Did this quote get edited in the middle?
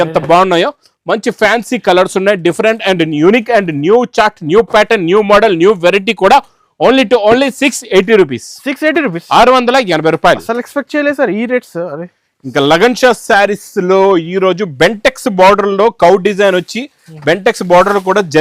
no; 0 cuts

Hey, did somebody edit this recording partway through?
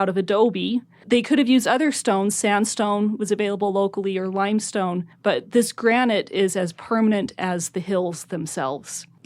yes; 1 cut; at 0.9 s

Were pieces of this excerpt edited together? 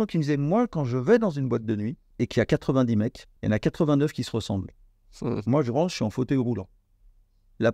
yes; 2 cuts; at 2.0 s, 3.3 s

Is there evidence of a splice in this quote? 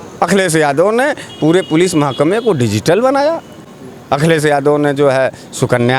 no; 0 cuts

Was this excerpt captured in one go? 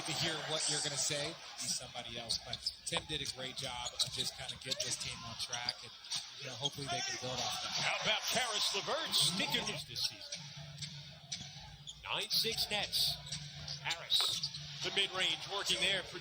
yes; 0 cuts

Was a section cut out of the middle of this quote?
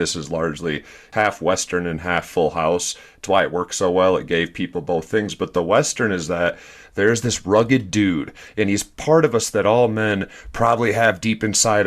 yes; 1 cut; at 1.1 s

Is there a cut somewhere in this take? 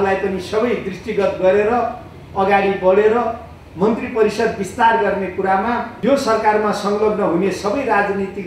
yes; 1 cut; at 5.9 s

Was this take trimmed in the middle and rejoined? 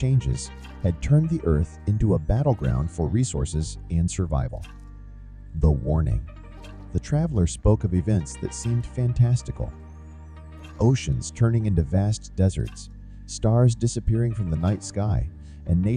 no; 0 cuts

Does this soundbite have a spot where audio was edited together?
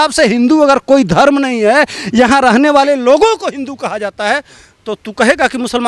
no; 0 cuts

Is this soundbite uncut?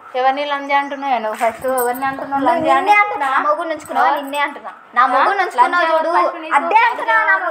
yes; 0 cuts

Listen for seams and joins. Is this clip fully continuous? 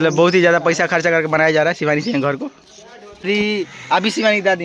no; 1 cut; at 3.2 s

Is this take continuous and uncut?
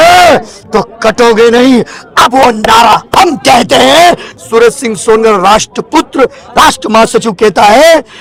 yes; 0 cuts

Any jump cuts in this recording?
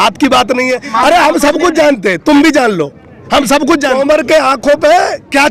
yes; 2 cuts; at 0.9 s, 4.0 s

